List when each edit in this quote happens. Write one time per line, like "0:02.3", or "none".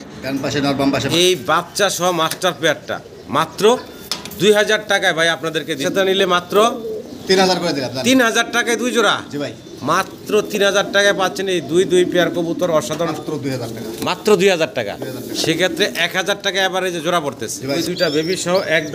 0:01.1
0:05.8
0:13.2
0:17.8